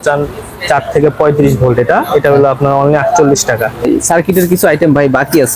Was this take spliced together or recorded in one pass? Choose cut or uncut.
cut